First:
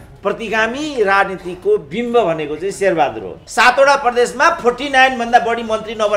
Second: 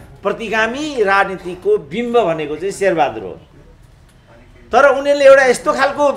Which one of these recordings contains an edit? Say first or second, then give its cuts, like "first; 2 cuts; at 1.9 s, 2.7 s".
first; 1 cut; at 3.4 s